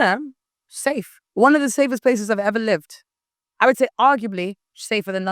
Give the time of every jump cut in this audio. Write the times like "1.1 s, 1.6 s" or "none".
1.2 s